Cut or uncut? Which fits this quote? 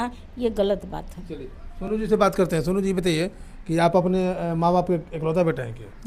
uncut